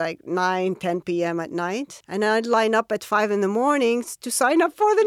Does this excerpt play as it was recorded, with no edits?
no; 1 cut; at 2.0 s

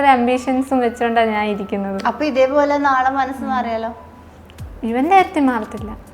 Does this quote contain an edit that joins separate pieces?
no; 0 cuts

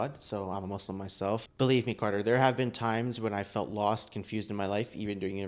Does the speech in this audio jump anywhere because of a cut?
yes; 1 cut; at 1.5 s

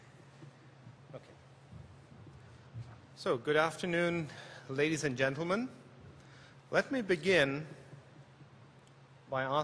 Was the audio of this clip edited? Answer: yes; 1 cut; at 2.1 s

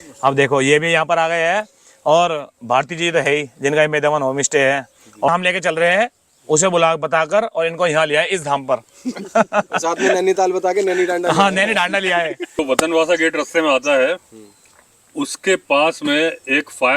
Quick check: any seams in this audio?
yes; 2 cuts; at 5.3 s, 12.6 s

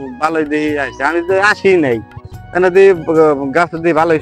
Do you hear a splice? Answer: no; 0 cuts

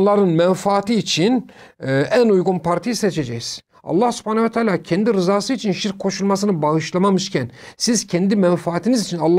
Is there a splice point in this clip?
no; 0 cuts

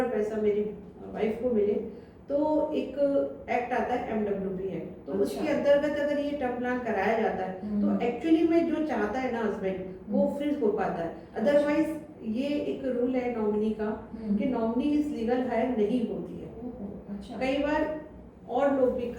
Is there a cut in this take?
no; 0 cuts

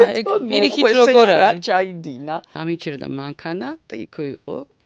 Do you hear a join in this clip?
yes; 1 cut; at 2.5 s

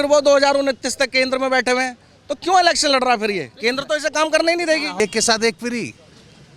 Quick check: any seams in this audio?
yes; 1 cut; at 5.0 s

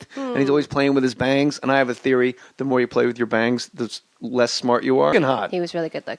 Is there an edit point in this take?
no; 0 cuts

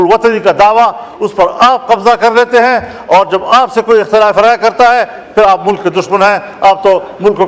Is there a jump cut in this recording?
no; 0 cuts

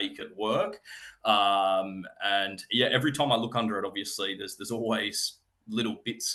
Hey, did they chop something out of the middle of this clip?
no; 0 cuts

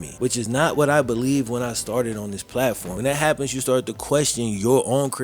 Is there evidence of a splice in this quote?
yes; 1 cut; at 2.9 s

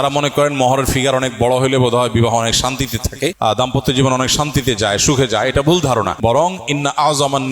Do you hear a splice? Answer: yes; 2 cuts; at 3.4 s, 6.1 s

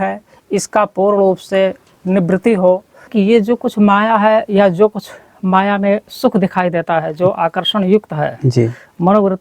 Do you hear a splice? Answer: yes; 1 cut; at 3.1 s

